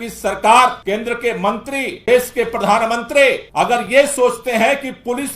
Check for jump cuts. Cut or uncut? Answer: cut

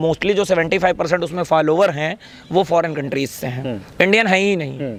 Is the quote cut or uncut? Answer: uncut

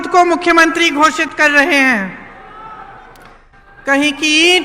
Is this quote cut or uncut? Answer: uncut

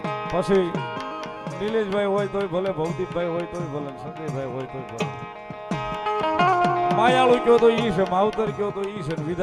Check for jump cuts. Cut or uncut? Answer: uncut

